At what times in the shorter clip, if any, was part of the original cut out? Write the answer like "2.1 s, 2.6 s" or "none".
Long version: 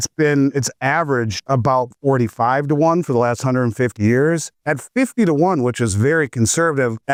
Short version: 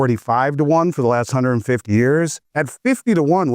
none